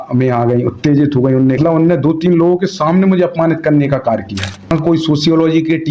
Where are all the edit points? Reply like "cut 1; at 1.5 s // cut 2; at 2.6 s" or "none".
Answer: cut 1; at 1.6 s // cut 2; at 4.7 s